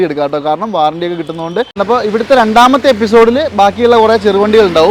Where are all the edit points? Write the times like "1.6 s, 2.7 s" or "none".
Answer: 1.8 s